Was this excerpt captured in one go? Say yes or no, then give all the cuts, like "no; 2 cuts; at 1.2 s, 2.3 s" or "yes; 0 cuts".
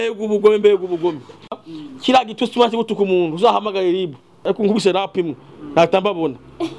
no; 1 cut; at 4.3 s